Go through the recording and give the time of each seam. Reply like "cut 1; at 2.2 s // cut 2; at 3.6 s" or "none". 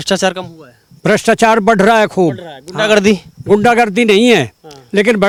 none